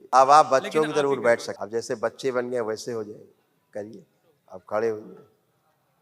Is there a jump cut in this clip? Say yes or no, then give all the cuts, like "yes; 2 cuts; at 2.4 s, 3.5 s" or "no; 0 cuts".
yes; 1 cut; at 1.5 s